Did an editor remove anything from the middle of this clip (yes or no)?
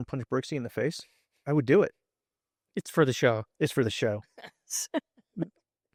no